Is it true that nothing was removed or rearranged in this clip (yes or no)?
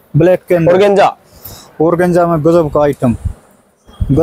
yes